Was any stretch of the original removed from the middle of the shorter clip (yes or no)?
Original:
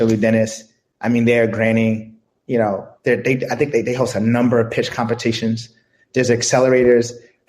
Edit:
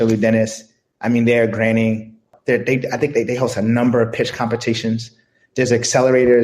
yes